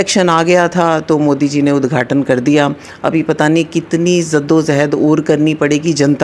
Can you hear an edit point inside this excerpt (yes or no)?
no